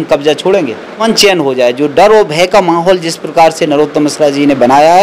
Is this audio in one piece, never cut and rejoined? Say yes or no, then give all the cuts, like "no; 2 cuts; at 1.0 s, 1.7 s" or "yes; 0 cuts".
no; 1 cut; at 1.1 s